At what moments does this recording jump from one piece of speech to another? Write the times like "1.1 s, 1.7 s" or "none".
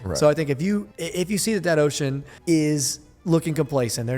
1.0 s, 2.3 s